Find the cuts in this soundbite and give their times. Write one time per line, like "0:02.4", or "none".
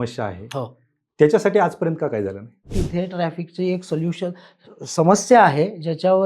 0:02.7